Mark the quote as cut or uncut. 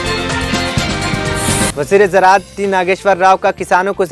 cut